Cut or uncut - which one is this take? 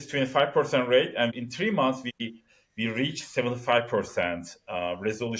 uncut